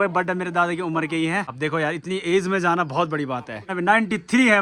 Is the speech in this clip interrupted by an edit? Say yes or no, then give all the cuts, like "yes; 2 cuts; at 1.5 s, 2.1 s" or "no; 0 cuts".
yes; 2 cuts; at 1.5 s, 3.7 s